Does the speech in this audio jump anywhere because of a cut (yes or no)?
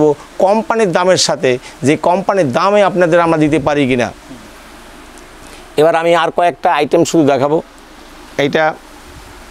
no